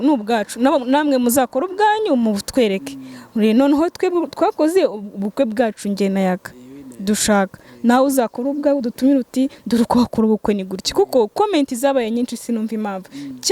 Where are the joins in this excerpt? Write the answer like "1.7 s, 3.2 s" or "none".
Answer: none

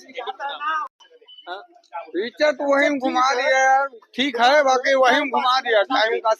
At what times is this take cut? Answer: 0.9 s

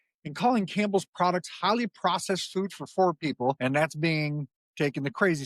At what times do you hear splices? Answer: 3.6 s

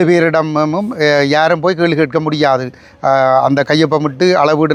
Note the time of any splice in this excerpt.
none

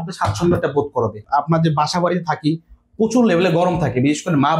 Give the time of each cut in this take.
1.2 s

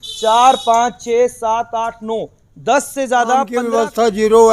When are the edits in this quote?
3.6 s

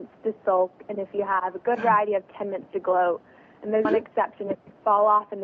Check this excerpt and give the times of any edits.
3.9 s

